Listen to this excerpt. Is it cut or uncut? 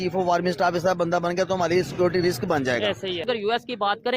cut